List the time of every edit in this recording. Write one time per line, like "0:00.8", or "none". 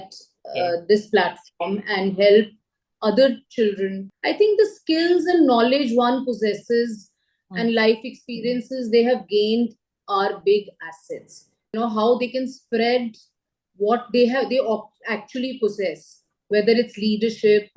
0:04.1
0:11.8